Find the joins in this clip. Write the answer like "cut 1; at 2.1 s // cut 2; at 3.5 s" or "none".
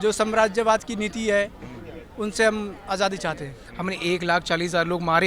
cut 1; at 3.6 s